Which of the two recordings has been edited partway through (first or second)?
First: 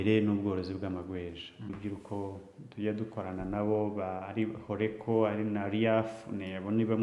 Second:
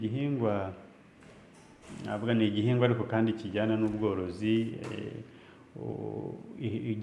first